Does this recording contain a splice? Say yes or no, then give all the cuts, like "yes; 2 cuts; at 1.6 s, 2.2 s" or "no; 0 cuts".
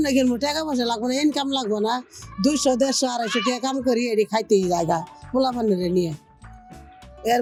no; 0 cuts